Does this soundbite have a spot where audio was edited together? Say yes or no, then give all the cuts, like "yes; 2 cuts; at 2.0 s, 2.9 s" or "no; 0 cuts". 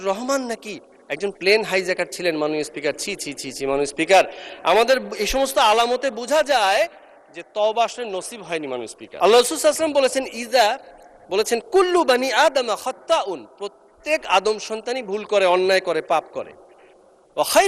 yes; 1 cut; at 9.0 s